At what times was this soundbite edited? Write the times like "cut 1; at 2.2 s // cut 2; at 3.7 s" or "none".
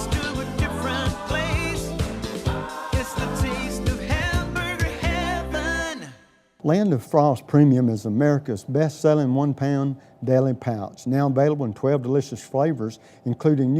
cut 1; at 6.5 s